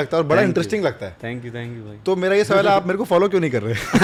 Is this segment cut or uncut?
uncut